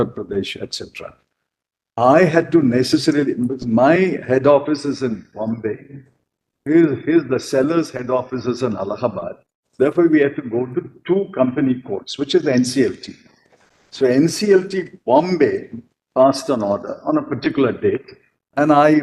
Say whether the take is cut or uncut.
uncut